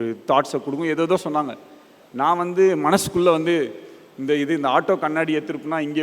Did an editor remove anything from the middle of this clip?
no; 0 cuts

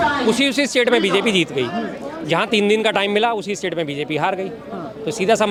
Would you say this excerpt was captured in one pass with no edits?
yes; 0 cuts

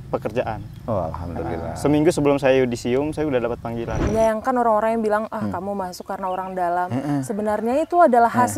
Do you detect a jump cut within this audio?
yes; 1 cut; at 4.0 s

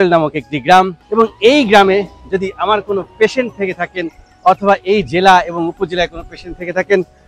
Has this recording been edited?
no; 0 cuts

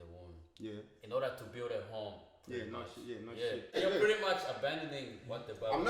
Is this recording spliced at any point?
yes; 1 cut; at 3.8 s

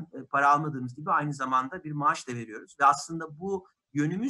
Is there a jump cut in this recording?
no; 0 cuts

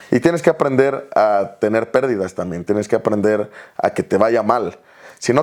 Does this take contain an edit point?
no; 0 cuts

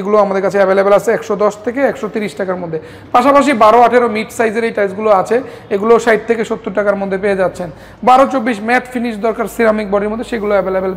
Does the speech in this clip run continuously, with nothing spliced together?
yes; 0 cuts

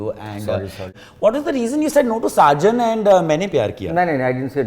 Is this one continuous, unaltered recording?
no; 1 cut; at 0.9 s

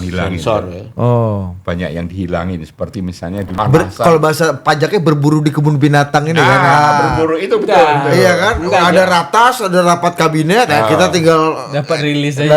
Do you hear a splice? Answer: yes; 1 cut; at 3.5 s

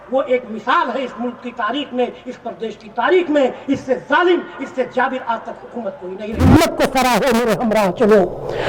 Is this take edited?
yes; 1 cut; at 6.4 s

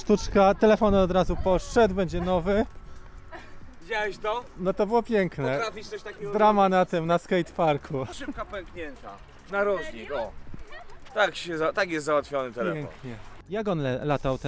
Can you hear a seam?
no; 0 cuts

